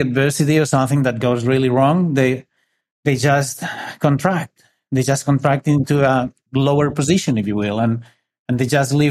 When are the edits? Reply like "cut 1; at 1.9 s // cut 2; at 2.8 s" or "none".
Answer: cut 1; at 6.4 s